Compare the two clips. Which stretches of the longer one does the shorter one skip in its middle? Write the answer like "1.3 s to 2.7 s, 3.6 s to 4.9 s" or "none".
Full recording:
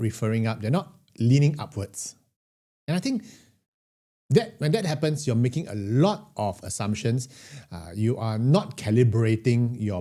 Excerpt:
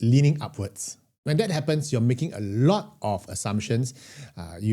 2.4 s to 4.5 s